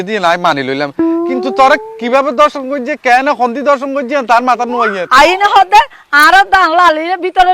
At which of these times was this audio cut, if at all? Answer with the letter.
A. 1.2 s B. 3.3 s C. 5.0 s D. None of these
C